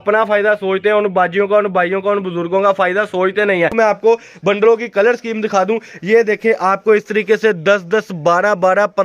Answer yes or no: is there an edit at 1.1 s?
no